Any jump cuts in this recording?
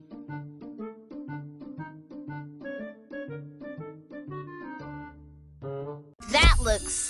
yes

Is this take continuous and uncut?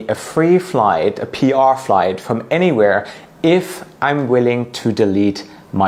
yes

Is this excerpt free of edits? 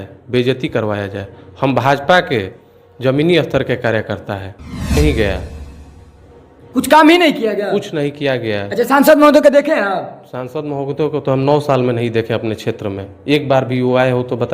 no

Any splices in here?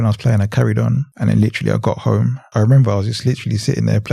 yes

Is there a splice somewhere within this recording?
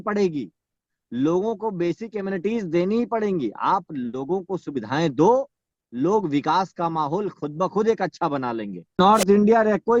yes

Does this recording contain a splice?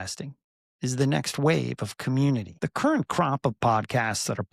yes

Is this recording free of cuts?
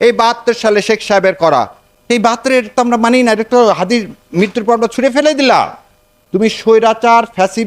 no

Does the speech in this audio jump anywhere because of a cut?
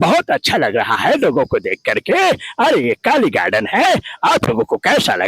no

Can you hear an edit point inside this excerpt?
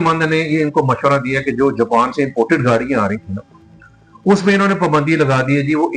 no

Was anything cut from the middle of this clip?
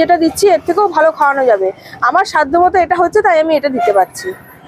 no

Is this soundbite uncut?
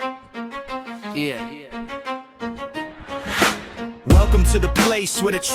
no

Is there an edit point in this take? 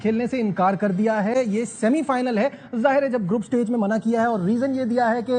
no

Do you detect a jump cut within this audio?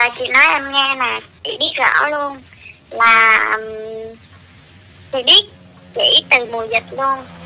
no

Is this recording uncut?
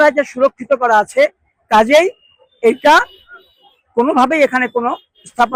yes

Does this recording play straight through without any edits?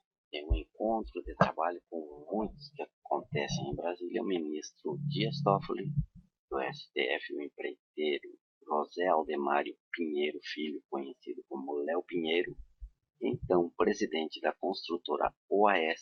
yes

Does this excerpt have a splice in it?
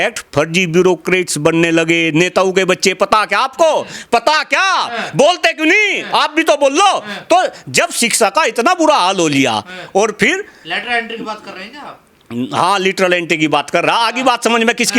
no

